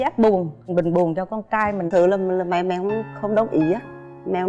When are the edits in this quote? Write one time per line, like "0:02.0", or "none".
0:01.9